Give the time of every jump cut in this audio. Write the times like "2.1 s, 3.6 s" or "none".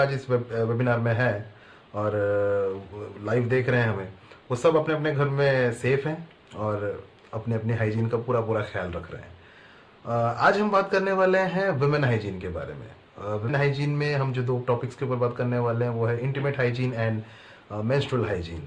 13.5 s